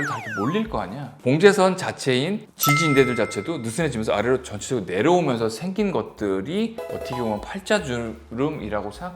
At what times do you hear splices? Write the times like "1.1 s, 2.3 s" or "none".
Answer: 1.1 s